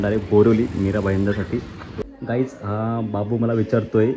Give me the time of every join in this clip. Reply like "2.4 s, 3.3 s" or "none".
1.9 s